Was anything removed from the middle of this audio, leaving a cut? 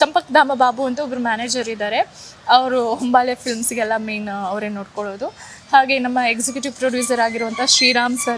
no; 0 cuts

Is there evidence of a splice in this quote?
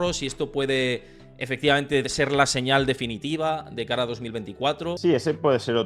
yes; 1 cut; at 5.0 s

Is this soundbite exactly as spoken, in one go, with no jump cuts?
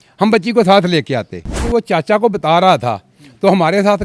no; 1 cut; at 1.7 s

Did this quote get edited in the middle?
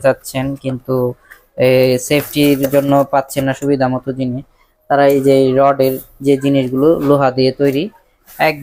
no; 0 cuts

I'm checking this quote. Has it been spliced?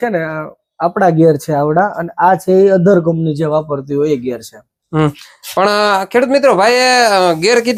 no; 0 cuts

